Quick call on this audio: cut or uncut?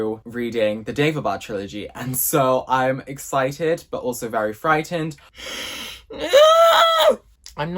cut